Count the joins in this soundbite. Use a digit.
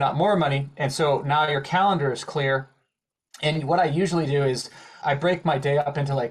1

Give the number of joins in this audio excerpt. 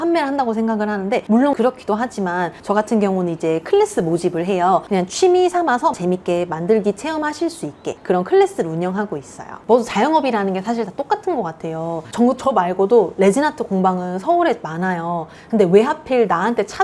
3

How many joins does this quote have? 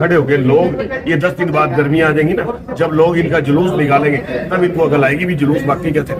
0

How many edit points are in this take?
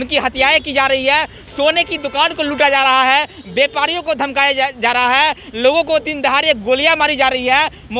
0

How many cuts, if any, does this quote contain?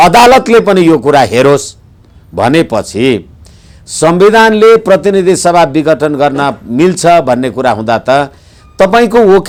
0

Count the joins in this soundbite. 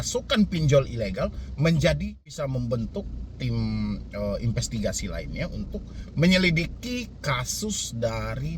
1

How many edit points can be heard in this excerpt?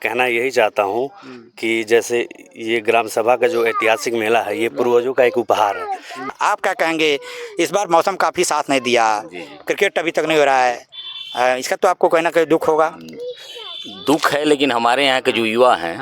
1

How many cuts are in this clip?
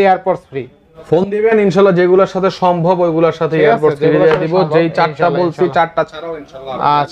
0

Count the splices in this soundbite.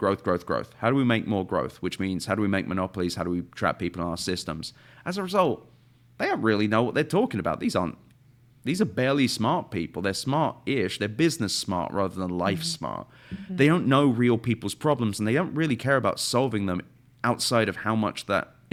0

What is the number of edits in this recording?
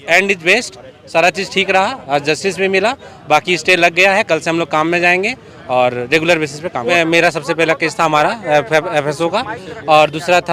1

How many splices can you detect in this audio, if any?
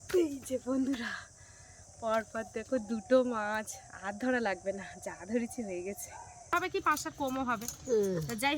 1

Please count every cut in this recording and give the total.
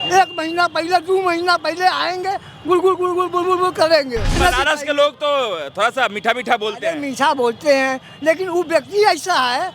1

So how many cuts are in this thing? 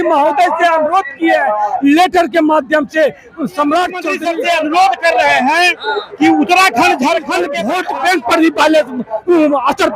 2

